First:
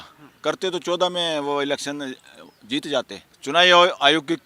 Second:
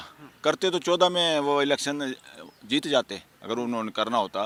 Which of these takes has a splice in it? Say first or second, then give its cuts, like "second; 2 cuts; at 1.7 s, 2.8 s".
first; 1 cut; at 3.2 s